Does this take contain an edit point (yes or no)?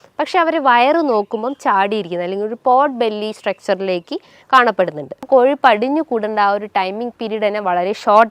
yes